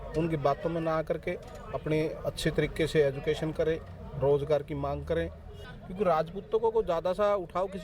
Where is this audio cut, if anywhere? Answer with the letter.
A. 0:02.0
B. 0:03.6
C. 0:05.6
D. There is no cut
C